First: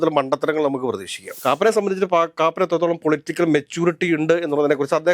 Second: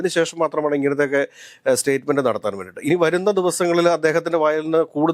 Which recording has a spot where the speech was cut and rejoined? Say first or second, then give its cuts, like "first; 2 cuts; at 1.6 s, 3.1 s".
first; 1 cut; at 1.3 s